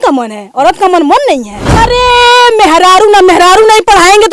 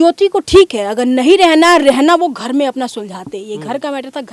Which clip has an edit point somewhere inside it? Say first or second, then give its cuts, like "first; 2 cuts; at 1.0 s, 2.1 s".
first; 1 cut; at 1.7 s